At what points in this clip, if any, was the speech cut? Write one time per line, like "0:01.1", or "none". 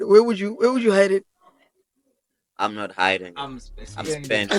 none